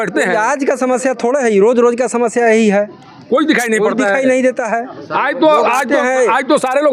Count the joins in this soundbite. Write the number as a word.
zero